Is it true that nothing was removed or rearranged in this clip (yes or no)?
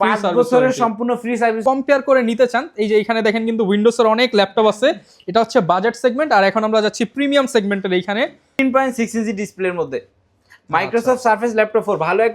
no